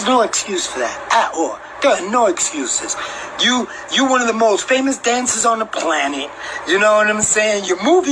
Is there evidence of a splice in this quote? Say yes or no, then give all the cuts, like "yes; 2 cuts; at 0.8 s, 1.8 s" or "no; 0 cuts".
no; 0 cuts